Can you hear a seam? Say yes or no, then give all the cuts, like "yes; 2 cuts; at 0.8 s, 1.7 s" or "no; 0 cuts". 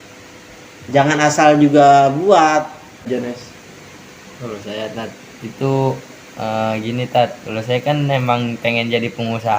yes; 1 cut; at 3.1 s